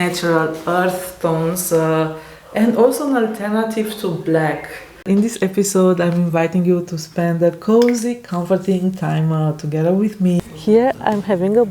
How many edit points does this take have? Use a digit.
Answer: 2